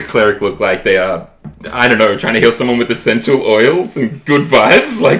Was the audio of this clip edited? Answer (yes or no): no